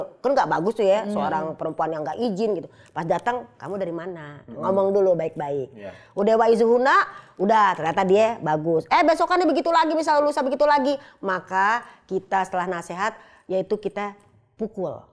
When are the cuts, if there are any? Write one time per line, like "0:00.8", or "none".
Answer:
none

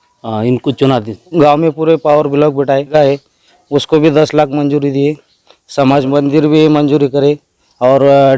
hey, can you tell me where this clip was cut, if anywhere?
0:01.3
0:02.9

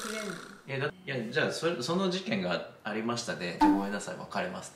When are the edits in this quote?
0:00.9

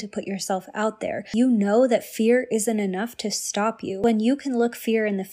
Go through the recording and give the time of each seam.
0:01.3
0:04.0

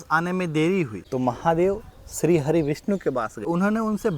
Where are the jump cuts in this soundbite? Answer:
0:01.0
0:03.4

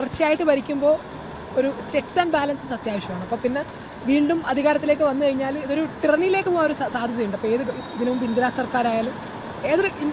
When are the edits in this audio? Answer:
none

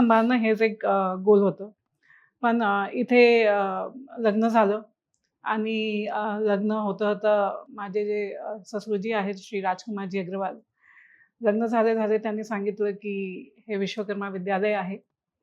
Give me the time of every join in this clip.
none

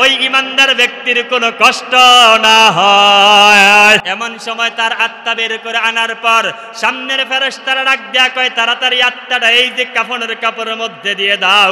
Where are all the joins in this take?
0:04.0

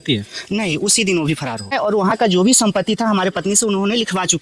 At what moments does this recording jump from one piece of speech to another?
0:01.7

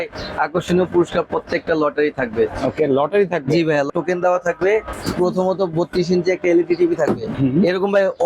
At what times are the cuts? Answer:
0:03.9
0:04.9
0:07.3

